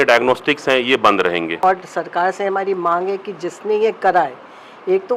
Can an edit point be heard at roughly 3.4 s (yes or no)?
no